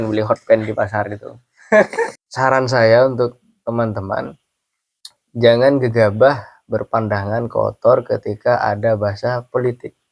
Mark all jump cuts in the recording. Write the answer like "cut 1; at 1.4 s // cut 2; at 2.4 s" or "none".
cut 1; at 2.2 s